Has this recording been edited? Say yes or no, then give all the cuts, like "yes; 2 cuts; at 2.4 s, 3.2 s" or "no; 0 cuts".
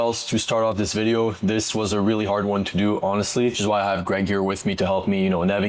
no; 0 cuts